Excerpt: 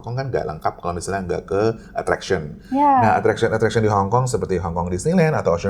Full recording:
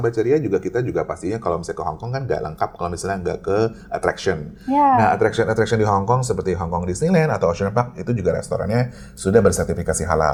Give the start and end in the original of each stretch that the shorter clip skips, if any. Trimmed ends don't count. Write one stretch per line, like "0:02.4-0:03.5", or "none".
none